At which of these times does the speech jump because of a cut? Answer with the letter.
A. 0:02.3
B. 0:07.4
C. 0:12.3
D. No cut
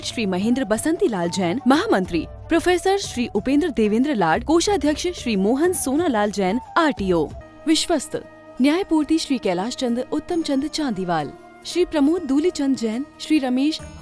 B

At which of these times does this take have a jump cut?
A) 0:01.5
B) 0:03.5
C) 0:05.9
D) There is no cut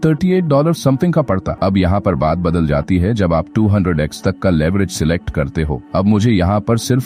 A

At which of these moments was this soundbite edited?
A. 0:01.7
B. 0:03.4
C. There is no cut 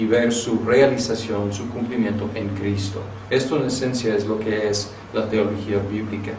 B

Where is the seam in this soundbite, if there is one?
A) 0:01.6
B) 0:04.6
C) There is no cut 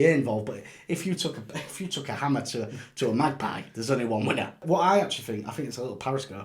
B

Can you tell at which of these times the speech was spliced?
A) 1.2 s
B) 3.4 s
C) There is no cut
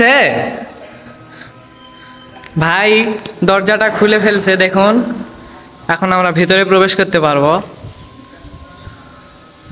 C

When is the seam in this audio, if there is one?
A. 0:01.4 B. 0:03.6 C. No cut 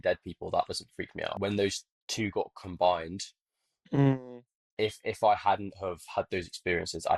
A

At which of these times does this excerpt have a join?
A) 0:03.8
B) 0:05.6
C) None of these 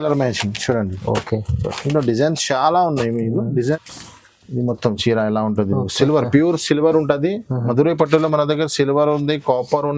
A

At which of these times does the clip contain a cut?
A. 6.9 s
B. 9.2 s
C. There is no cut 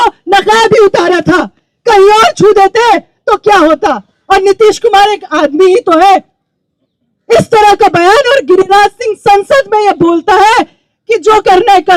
C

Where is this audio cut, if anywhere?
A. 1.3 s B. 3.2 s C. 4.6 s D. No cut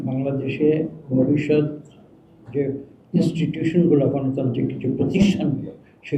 D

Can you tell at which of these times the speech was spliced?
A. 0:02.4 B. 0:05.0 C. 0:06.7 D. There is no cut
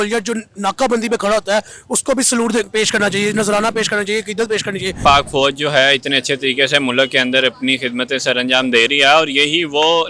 B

